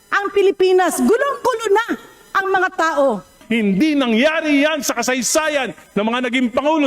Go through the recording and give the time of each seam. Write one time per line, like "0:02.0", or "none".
0:03.4